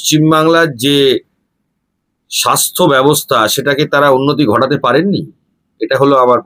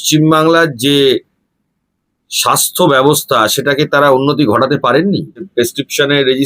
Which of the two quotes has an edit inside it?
second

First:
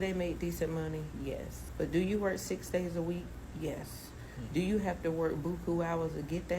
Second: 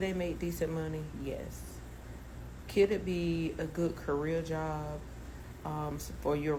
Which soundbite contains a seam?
first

